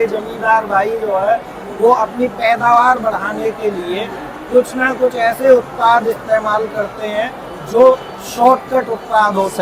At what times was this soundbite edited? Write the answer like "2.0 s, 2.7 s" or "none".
none